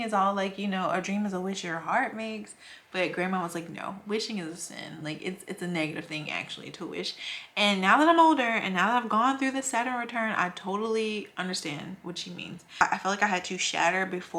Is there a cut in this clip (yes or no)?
yes